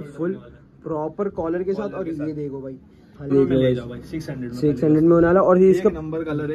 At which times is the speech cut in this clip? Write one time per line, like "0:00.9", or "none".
0:03.3